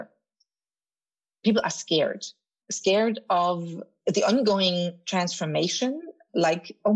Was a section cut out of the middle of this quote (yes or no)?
yes